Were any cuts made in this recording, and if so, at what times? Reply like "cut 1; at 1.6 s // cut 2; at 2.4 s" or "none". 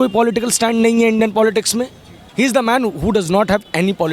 cut 1; at 2.2 s